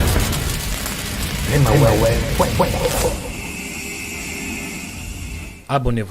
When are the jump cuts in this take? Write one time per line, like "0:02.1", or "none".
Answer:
0:01.1
0:05.0